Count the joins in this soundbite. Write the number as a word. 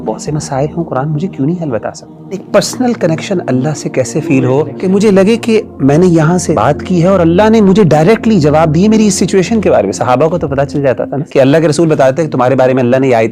four